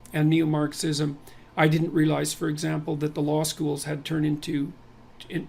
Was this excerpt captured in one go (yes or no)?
no